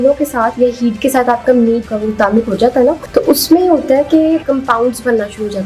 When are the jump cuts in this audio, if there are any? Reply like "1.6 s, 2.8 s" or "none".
1.9 s, 3.0 s, 4.4 s